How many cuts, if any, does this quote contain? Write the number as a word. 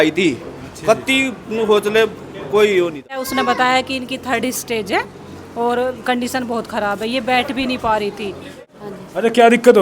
two